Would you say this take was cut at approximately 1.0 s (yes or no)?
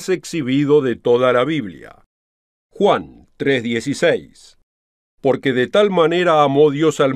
no